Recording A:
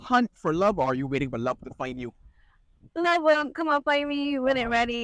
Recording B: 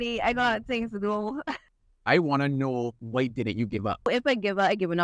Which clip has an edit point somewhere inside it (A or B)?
B